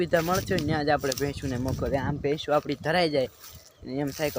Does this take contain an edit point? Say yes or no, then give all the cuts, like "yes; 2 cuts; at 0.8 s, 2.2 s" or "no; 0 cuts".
no; 0 cuts